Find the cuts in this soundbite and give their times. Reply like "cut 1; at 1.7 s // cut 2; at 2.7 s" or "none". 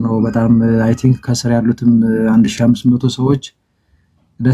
none